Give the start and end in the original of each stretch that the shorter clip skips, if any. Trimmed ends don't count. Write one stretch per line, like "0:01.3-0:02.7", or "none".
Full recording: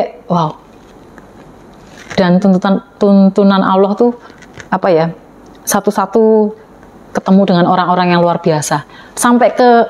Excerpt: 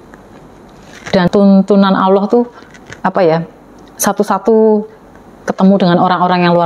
0:02.3-0:03.0